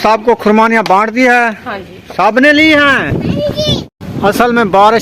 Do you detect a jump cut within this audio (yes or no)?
yes